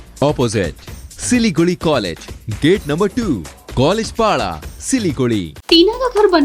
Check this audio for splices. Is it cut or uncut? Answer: cut